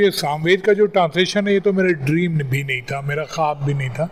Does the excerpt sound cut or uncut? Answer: uncut